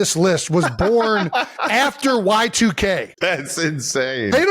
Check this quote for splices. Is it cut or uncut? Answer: cut